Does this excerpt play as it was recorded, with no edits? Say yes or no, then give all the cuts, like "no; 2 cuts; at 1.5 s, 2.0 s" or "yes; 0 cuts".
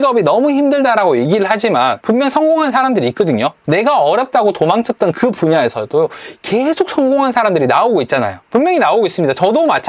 yes; 0 cuts